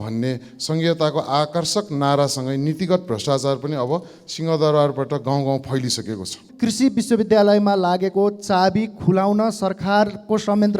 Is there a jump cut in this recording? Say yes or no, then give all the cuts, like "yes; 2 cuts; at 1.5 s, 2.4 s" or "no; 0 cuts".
yes; 1 cut; at 6.4 s